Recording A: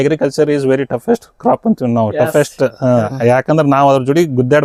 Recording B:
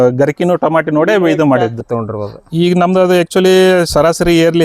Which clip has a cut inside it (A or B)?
B